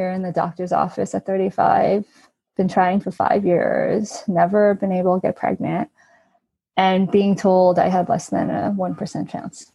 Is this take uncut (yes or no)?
yes